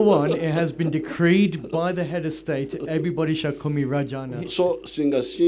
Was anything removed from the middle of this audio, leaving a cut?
no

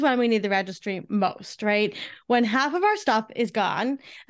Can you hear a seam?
no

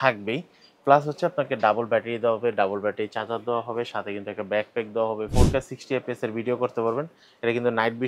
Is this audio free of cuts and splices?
no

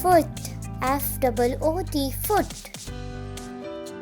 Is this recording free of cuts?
no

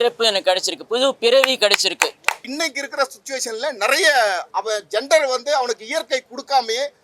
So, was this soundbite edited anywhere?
yes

